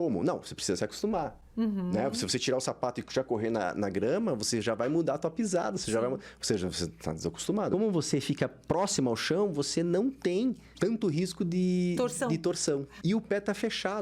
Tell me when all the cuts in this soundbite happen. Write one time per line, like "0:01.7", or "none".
0:07.7
0:10.7
0:12.9